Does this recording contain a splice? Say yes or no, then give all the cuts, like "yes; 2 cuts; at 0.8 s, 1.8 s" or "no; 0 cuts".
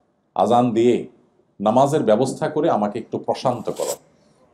no; 0 cuts